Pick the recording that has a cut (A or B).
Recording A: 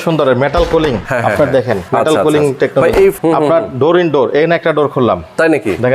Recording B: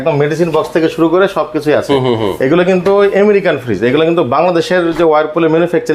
A